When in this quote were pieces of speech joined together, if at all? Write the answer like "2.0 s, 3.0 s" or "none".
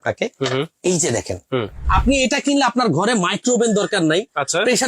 1.8 s